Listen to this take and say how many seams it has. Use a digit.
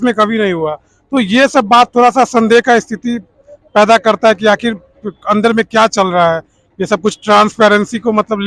0